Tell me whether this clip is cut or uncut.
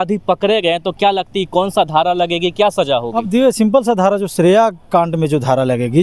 uncut